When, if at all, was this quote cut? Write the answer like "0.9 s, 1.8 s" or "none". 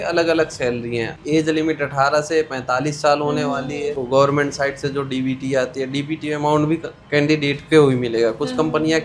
1.2 s, 4.0 s